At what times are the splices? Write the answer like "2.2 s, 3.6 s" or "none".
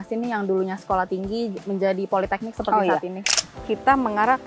3.3 s